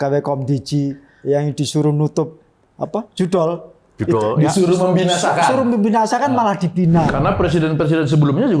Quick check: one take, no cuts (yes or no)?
no